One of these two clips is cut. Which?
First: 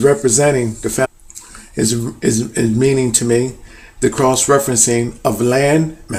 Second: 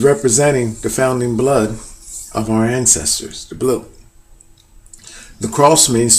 second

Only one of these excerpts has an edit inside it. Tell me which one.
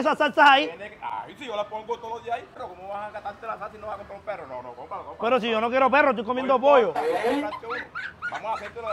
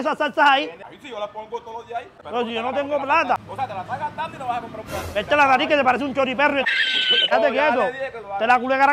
second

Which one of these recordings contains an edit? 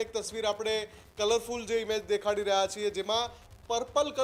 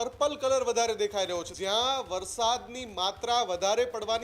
second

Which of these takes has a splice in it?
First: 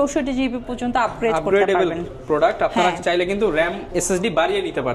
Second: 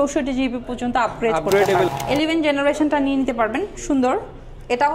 second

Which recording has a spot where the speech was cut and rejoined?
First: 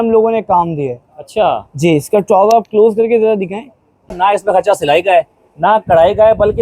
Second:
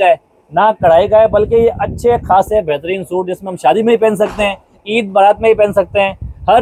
first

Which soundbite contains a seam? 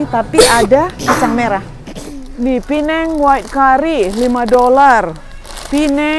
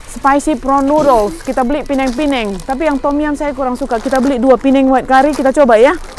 first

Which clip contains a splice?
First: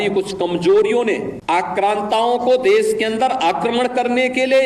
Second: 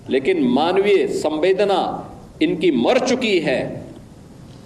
first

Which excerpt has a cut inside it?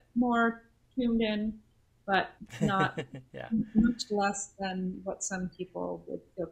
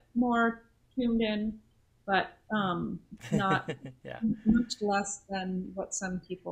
first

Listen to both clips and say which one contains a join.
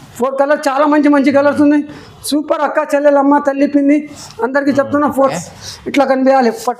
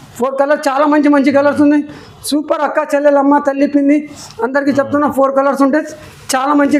first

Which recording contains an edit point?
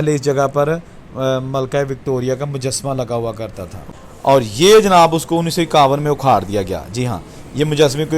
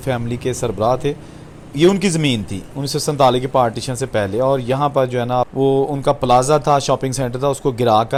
first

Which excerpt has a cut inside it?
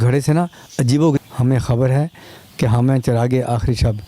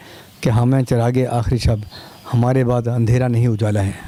first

